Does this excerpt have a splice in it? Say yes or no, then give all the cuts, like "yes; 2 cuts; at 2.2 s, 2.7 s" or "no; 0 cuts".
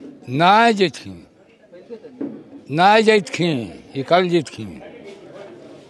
no; 0 cuts